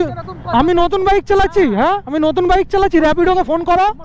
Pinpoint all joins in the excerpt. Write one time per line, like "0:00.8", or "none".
none